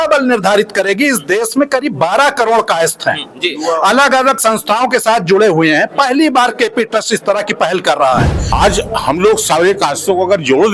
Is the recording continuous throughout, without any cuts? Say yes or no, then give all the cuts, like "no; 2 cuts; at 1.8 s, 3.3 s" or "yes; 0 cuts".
no; 1 cut; at 8.4 s